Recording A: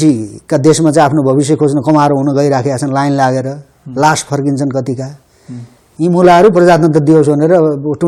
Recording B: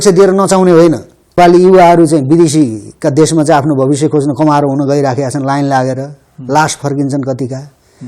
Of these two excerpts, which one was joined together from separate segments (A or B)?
B